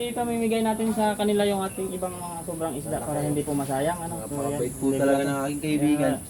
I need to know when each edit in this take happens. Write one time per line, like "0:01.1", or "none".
none